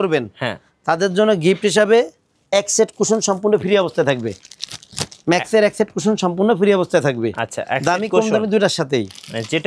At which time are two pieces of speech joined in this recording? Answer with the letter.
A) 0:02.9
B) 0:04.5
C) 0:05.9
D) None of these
D